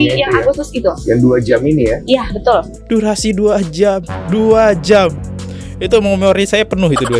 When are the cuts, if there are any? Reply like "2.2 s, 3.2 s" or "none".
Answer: 2.8 s